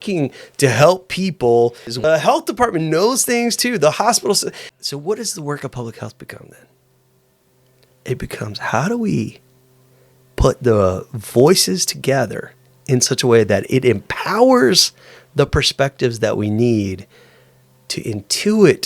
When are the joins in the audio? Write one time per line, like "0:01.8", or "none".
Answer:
0:02.0
0:04.7